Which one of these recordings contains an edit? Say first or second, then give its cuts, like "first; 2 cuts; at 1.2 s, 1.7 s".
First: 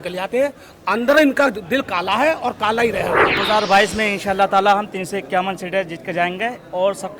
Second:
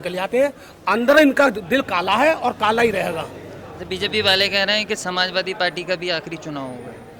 first; 1 cut; at 3.4 s